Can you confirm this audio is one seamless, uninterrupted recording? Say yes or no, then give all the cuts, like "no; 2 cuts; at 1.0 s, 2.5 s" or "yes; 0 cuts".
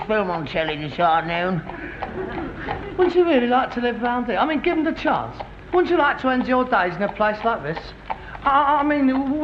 yes; 0 cuts